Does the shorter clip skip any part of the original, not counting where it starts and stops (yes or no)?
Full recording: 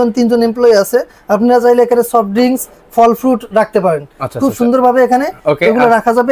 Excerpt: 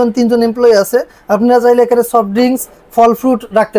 no